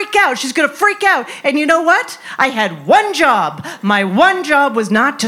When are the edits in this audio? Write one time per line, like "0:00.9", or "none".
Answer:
none